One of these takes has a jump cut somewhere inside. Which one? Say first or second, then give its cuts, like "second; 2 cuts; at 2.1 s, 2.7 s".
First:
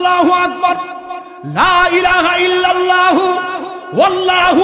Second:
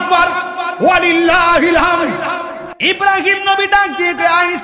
second; 1 cut; at 2.6 s